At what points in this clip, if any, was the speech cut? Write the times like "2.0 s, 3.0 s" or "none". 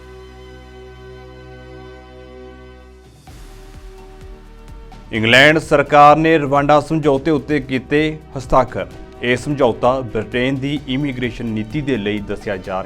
5.1 s

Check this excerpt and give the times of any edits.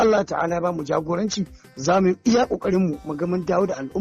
none

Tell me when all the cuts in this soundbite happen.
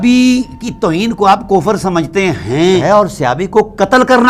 2.8 s

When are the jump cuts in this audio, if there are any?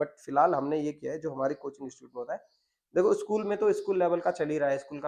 none

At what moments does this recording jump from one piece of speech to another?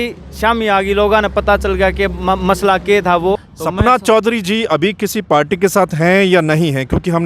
3.5 s

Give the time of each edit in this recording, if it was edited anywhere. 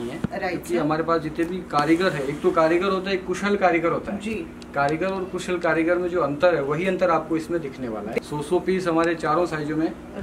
8.2 s

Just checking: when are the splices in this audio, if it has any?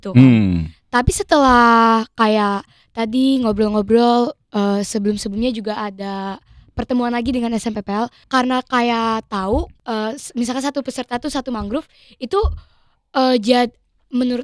8.2 s, 9.8 s

